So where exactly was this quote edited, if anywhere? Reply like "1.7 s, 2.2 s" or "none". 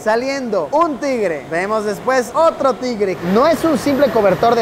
3.2 s